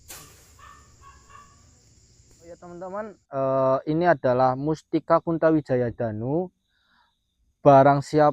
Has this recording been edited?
yes; 1 cut; at 2.6 s

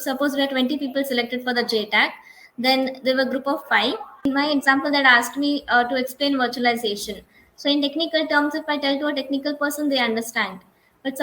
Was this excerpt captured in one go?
no; 1 cut; at 4.2 s

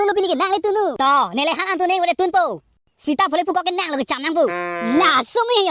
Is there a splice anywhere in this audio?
yes; 1 cut; at 0.9 s

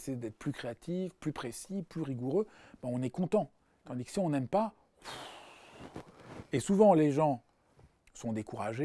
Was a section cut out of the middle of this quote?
no; 0 cuts

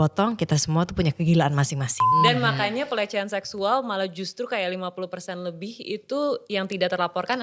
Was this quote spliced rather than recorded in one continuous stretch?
yes; 1 cut; at 2.1 s

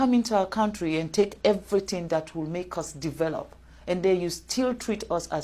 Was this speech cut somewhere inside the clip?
no; 0 cuts

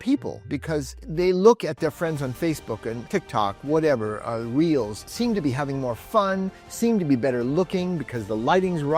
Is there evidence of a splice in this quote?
yes; 3 cuts; at 1.0 s, 3.0 s, 5.1 s

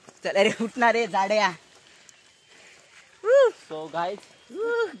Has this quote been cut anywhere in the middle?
no; 0 cuts

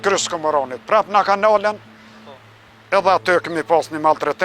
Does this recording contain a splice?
no; 0 cuts

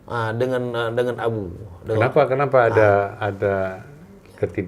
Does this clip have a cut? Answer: no; 0 cuts

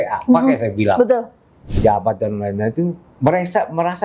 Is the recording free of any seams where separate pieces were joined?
no; 1 cut; at 1.8 s

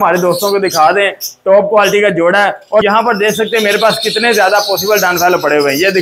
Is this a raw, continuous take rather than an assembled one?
no; 1 cut; at 2.8 s

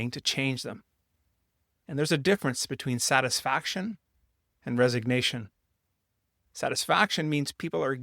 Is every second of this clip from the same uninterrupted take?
yes; 0 cuts

